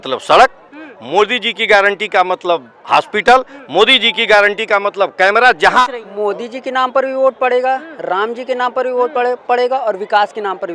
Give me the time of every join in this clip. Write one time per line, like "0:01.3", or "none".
0:05.8